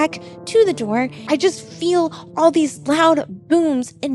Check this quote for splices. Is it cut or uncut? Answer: cut